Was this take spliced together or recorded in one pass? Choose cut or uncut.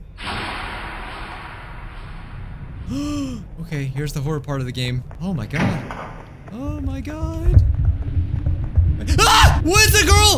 cut